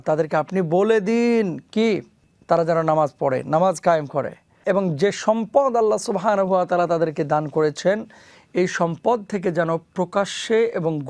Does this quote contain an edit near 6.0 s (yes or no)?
no